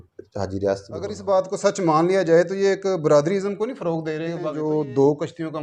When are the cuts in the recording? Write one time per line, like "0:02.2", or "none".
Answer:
0:01.2
0:04.4